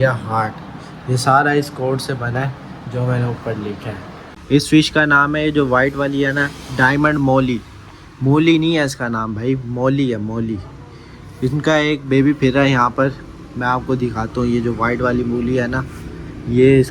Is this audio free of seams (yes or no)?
no